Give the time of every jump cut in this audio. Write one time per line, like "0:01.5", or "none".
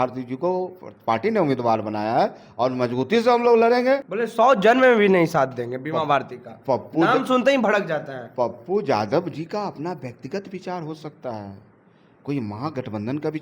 0:04.1